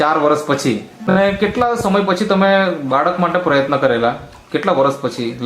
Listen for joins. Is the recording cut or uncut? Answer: cut